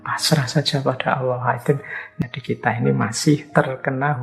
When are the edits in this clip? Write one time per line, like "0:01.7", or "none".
0:02.0
0:03.5